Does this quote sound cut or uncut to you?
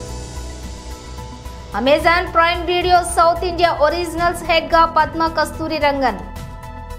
uncut